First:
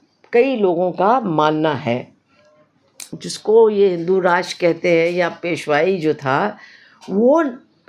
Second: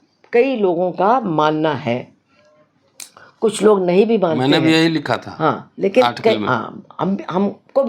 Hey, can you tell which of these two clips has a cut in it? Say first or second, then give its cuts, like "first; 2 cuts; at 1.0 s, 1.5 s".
first; 1 cut; at 3.2 s